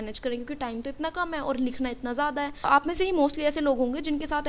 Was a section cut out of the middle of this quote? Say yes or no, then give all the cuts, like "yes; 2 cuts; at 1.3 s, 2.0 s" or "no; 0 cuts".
yes; 1 cut; at 2.7 s